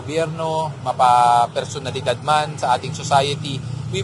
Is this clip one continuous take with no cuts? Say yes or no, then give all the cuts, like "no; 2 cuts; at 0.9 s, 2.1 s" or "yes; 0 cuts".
yes; 0 cuts